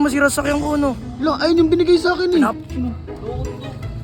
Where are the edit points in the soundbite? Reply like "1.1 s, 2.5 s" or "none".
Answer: 2.6 s